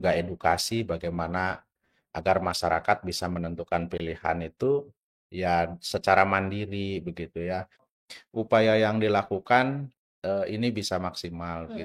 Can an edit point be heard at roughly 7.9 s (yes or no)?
yes